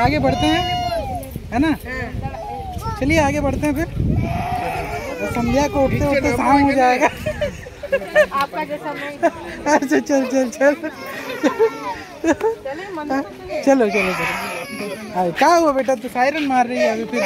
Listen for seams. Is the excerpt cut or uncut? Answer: uncut